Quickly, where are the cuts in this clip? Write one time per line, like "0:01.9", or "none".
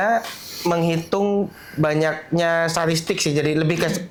none